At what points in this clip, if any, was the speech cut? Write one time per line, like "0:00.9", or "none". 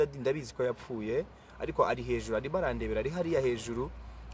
none